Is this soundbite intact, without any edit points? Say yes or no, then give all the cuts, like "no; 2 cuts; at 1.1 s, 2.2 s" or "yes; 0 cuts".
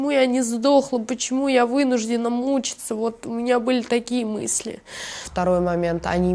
no; 1 cut; at 5.2 s